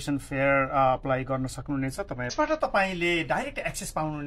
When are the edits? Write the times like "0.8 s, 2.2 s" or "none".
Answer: 2.3 s